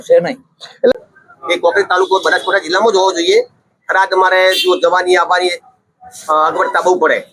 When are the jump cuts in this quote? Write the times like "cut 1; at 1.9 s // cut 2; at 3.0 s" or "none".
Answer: cut 1; at 0.9 s